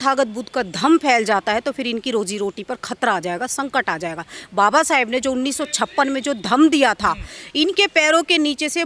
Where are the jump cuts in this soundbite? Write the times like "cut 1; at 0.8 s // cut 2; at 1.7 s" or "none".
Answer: none